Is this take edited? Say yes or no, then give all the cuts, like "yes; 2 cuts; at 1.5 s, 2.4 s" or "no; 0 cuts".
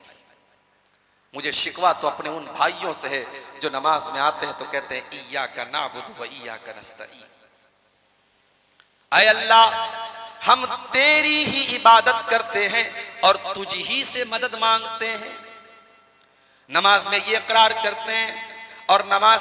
no; 0 cuts